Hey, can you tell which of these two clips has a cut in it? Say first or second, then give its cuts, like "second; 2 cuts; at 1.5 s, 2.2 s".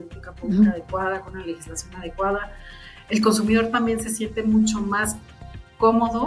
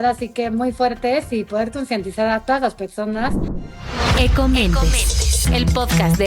second; 1 cut; at 3.3 s